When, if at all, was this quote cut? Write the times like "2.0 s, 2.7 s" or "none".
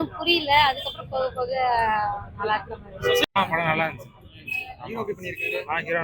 3.2 s

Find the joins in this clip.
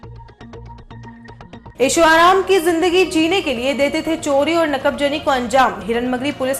1.7 s

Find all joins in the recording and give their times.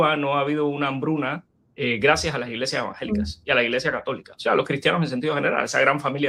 none

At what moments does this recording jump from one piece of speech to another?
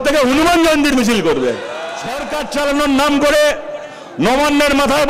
2.2 s

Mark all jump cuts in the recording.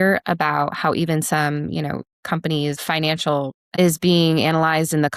3.7 s

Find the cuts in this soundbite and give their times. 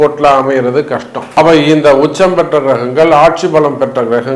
1.2 s

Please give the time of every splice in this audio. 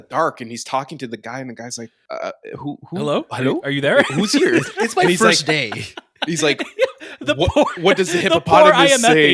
1.9 s

